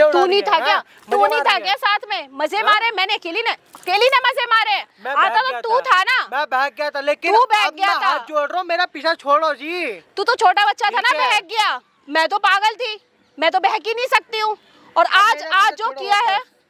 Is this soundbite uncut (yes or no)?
yes